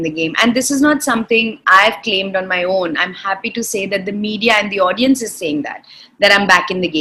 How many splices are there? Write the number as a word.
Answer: zero